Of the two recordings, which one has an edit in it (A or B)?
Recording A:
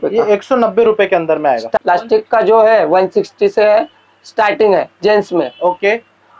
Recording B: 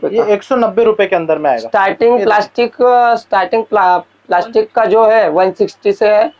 A